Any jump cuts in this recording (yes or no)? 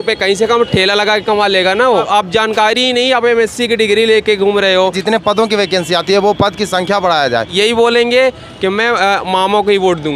yes